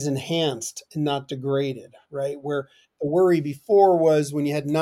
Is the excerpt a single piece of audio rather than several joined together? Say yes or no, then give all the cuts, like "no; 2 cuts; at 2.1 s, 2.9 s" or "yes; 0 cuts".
yes; 0 cuts